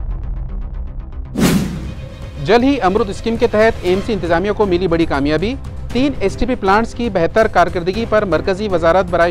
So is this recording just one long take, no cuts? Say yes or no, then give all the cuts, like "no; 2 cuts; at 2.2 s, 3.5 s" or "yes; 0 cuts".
no; 1 cut; at 2.2 s